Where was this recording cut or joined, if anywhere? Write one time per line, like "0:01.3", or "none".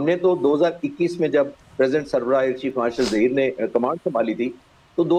none